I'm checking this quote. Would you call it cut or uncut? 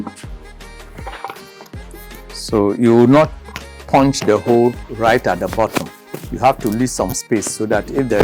uncut